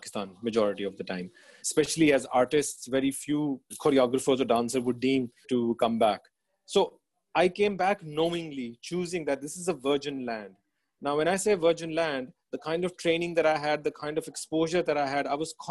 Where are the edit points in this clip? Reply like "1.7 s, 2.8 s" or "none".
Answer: 1.6 s, 3.7 s, 5.4 s